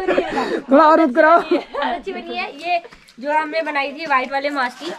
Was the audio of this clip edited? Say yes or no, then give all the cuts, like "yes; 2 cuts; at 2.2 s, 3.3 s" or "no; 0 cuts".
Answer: no; 0 cuts